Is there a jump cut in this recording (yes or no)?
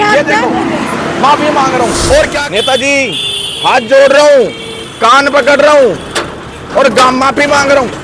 yes